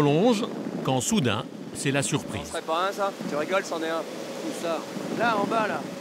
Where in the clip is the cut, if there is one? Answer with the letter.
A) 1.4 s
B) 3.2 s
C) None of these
B